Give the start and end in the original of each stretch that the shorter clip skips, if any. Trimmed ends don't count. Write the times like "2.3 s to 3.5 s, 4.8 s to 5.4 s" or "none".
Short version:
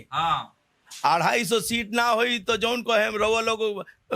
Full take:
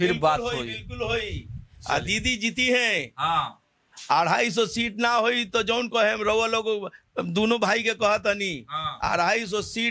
none

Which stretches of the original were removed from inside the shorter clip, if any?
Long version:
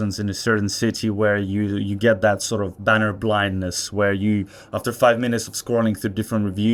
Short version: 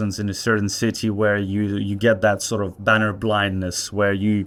none

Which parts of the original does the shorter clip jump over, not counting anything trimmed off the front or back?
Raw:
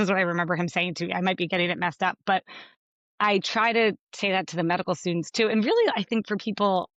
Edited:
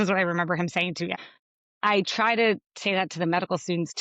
1.1 s to 2.5 s

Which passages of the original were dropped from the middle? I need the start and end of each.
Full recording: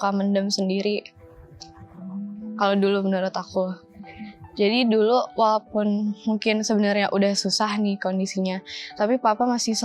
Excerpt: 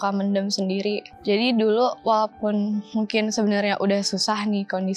1.1 s to 4.4 s

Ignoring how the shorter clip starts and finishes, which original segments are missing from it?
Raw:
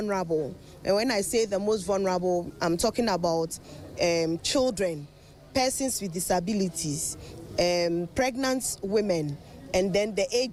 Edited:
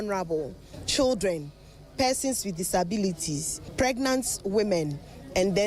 0.8 s to 4.4 s, 7.3 s to 8.1 s

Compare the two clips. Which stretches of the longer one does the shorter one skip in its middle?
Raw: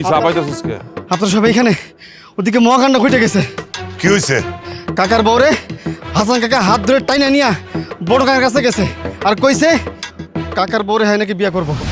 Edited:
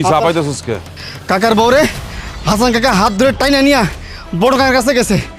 0.9 s to 4.6 s

